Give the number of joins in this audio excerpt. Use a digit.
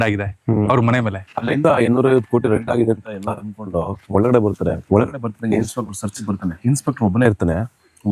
4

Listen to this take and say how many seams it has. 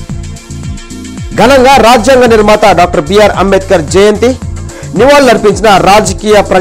0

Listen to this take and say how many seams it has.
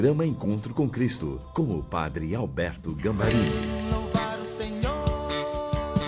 1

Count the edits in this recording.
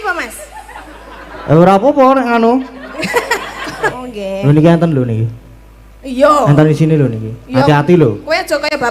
1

